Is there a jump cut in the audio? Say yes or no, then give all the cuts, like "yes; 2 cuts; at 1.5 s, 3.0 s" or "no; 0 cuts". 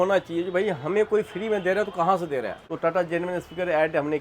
yes; 1 cut; at 2.7 s